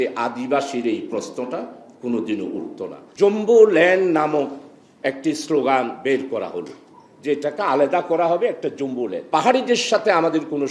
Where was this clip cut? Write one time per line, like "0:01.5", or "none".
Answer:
0:03.0
0:09.2